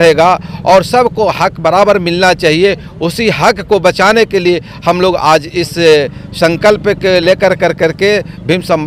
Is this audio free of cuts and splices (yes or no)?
yes